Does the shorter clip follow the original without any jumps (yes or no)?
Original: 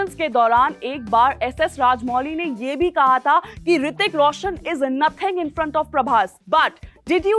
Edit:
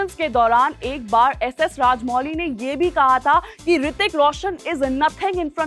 yes